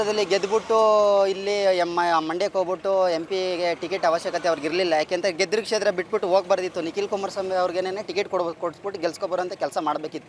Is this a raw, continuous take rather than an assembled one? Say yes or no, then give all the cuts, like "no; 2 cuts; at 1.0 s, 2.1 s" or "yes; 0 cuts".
yes; 0 cuts